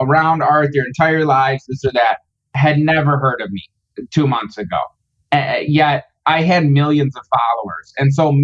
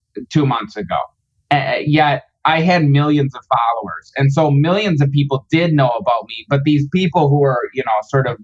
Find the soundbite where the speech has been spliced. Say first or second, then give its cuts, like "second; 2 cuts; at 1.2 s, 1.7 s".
first; 1 cut; at 2.5 s